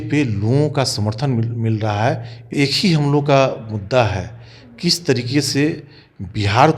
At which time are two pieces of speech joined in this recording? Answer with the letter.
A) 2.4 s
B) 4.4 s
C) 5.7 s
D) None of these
A